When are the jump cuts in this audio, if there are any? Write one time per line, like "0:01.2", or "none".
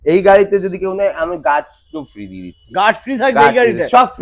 none

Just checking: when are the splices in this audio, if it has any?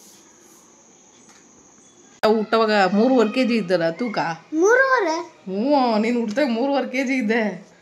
0:02.2

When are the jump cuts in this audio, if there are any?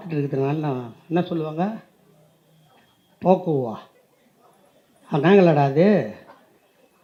none

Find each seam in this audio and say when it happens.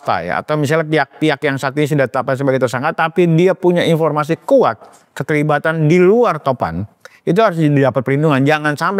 none

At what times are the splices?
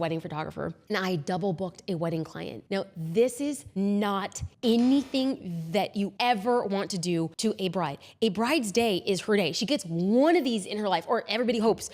0:03.6
0:04.4
0:06.1
0:07.3

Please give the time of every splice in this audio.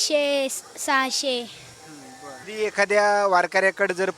0:02.4

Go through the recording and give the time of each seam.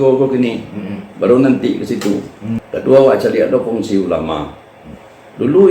0:02.6

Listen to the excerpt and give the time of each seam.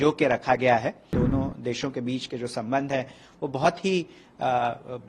0:01.0

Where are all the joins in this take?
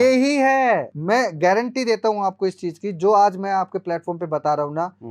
0:00.9

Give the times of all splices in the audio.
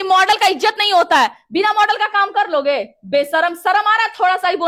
none

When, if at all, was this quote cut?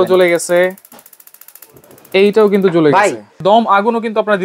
0:03.4

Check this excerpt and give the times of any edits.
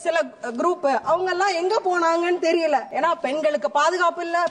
0:02.9

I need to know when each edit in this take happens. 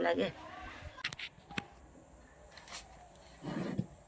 0:01.0

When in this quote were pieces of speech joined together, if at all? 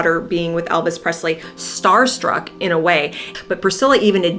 0:03.3

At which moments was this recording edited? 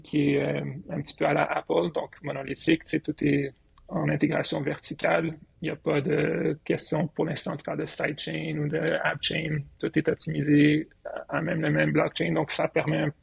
none

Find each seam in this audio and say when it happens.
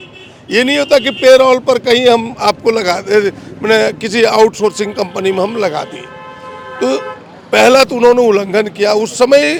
none

